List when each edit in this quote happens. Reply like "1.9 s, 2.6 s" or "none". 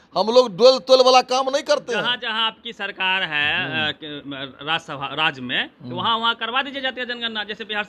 none